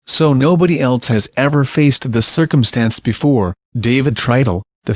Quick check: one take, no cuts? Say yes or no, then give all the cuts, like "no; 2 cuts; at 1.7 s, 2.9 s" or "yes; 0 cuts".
no; 1 cut; at 3.2 s